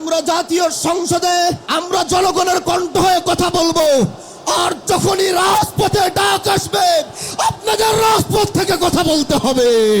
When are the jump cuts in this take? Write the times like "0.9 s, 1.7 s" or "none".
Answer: 1.6 s